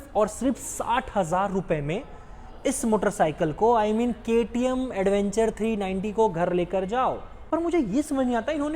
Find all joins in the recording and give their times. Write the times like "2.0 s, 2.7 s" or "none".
7.3 s